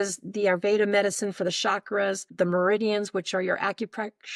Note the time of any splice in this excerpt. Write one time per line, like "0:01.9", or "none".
0:02.3